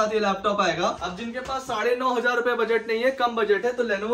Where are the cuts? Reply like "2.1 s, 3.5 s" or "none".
1.0 s